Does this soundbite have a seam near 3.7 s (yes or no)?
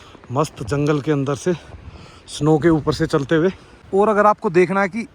yes